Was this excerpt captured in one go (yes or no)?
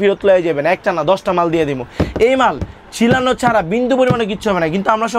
yes